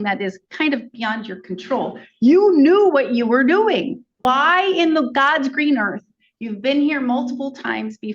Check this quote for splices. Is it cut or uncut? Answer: cut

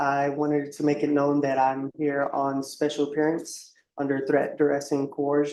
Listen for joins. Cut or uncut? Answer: uncut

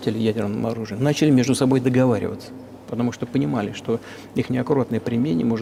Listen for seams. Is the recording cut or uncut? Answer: uncut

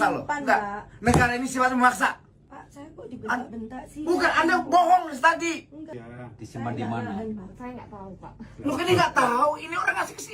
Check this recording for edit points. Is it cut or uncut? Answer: cut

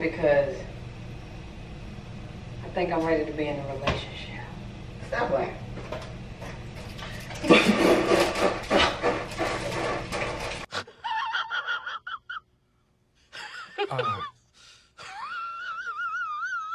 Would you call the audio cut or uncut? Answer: uncut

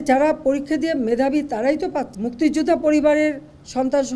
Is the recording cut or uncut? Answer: cut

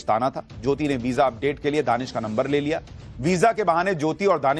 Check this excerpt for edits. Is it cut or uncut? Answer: uncut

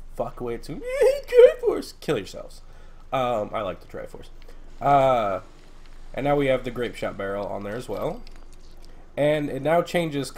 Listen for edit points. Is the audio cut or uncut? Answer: uncut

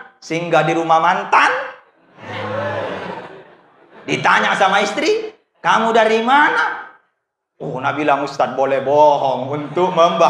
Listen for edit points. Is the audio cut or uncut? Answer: uncut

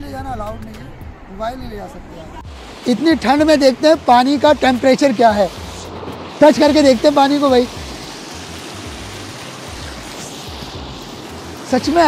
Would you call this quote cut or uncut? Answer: cut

